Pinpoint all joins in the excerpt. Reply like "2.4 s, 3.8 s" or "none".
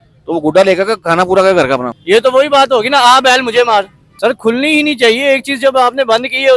1.9 s, 4.0 s